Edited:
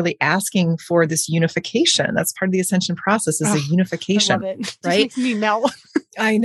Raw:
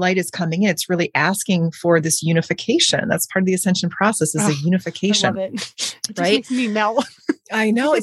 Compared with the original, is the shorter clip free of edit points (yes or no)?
no